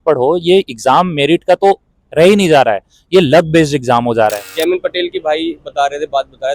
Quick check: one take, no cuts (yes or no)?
no